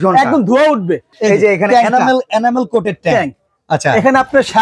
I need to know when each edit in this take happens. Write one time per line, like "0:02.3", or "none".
0:01.0